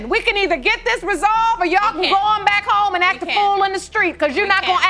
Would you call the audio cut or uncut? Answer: uncut